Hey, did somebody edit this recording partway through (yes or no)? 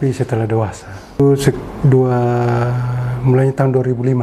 yes